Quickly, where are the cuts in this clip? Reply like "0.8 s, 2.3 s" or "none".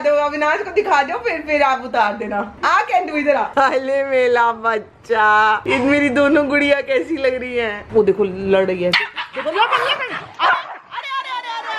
none